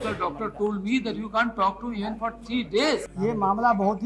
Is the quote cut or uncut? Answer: cut